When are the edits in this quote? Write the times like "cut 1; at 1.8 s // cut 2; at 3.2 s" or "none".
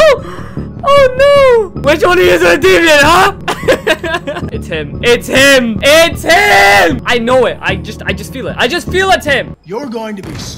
cut 1; at 1.7 s // cut 2; at 3.4 s // cut 3; at 4.5 s // cut 4; at 5.8 s // cut 5; at 7.0 s // cut 6; at 9.6 s

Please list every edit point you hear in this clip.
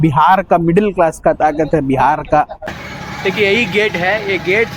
cut 1; at 2.8 s

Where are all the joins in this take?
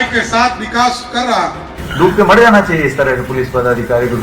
cut 1; at 1.6 s

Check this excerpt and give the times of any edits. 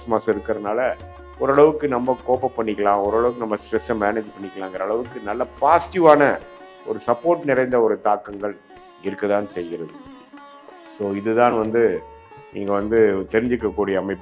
none

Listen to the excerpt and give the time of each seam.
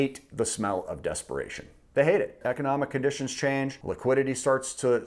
cut 1; at 2.4 s // cut 2; at 3.8 s

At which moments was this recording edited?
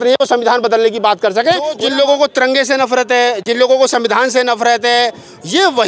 cut 1; at 1.8 s

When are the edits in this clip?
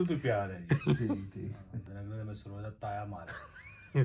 cut 1; at 1.9 s

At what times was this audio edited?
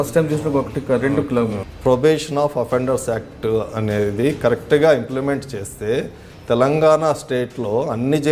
cut 1; at 1.6 s

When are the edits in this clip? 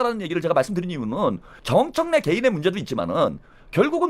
cut 1; at 1.5 s

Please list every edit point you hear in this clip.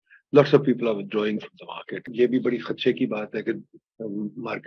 cut 1; at 2.1 s

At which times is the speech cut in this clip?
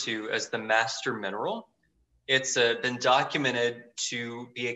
none

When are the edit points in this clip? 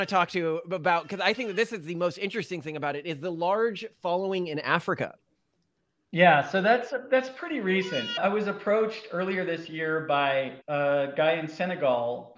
cut 1; at 8.2 s

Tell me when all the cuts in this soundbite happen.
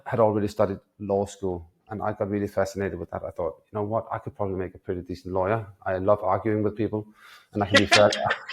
none

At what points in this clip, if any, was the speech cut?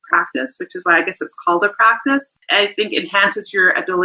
cut 1; at 2.4 s

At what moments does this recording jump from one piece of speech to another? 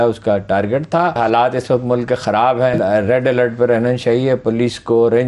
cut 1; at 1.2 s // cut 2; at 2.8 s

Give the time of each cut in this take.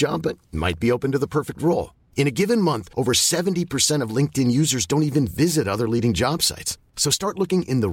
none

